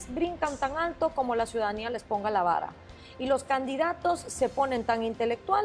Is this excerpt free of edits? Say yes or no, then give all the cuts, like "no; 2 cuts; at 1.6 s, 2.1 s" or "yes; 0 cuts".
yes; 0 cuts